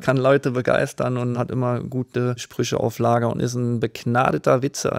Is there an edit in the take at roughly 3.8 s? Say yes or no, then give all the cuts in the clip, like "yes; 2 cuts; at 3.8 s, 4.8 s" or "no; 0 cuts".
no; 2 cuts; at 1.3 s, 2.5 s